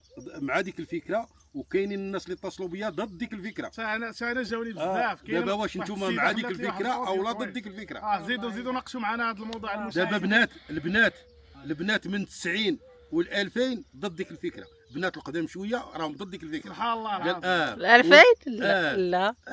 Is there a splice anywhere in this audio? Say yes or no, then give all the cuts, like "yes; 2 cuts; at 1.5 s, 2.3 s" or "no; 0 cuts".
no; 0 cuts